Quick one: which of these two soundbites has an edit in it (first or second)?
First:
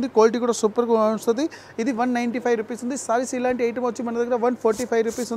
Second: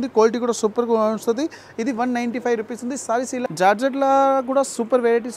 second